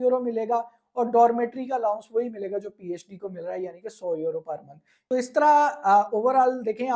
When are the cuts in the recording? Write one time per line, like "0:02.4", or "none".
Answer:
0:04.9